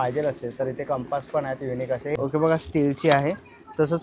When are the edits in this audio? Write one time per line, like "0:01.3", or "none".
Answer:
0:02.2